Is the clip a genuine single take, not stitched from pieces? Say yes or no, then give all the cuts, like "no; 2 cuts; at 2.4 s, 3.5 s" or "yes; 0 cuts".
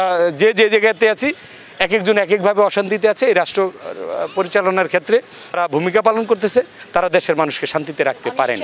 no; 1 cut; at 5.6 s